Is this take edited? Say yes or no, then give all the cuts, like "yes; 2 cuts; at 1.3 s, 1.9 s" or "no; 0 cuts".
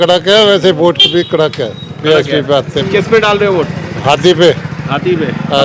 yes; 1 cut; at 2.8 s